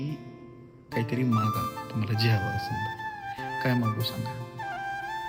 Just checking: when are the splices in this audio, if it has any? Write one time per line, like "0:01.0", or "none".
none